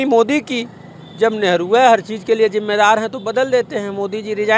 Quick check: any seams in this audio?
no; 0 cuts

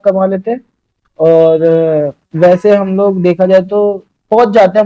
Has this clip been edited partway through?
no; 0 cuts

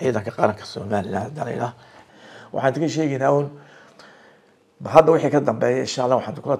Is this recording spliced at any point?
yes; 1 cut; at 2.0 s

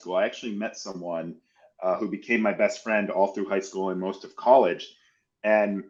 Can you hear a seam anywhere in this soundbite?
no; 0 cuts

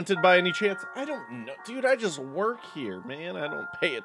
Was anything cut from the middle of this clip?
no; 0 cuts

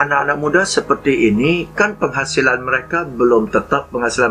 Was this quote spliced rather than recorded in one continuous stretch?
no; 0 cuts

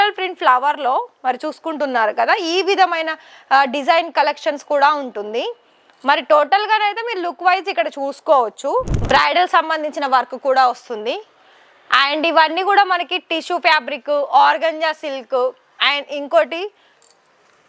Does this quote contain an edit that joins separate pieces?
yes; 1 cut; at 8.9 s

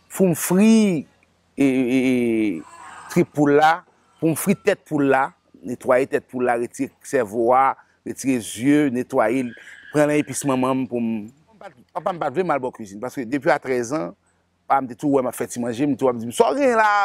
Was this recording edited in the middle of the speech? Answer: yes; 1 cut; at 11.9 s

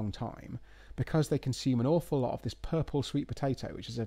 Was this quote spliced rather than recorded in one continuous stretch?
no; 0 cuts

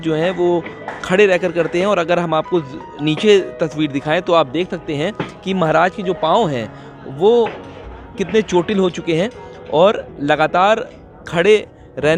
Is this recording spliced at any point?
no; 0 cuts

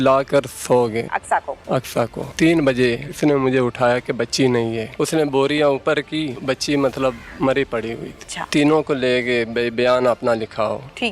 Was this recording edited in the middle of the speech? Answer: yes; 7 cuts; at 1.1 s, 2.2 s, 3.1 s, 4.9 s, 6.4 s, 7.3 s, 8.3 s

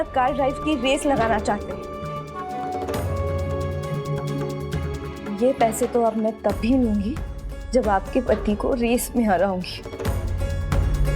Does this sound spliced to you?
yes; 1 cut; at 1.6 s

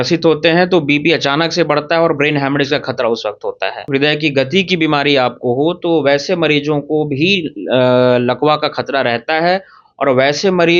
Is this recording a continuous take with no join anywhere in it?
no; 1 cut; at 3.9 s

